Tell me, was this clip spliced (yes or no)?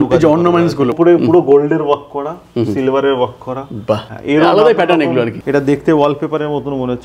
yes